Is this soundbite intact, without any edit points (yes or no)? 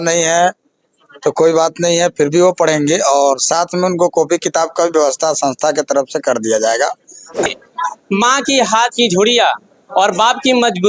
no